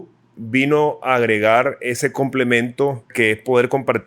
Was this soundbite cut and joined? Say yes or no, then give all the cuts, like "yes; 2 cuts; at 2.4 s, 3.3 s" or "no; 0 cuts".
yes; 1 cut; at 3.1 s